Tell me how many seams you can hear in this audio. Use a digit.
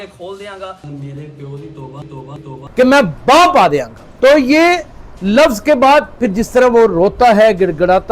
2